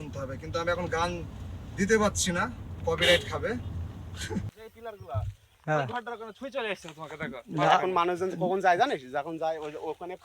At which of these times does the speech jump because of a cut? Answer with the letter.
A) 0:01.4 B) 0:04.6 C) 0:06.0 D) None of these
B